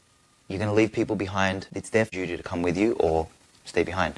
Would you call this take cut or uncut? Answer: cut